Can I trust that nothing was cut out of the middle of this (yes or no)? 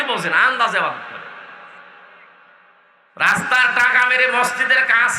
yes